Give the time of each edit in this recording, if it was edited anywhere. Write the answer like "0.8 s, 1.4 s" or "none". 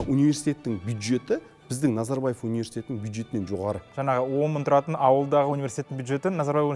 3.9 s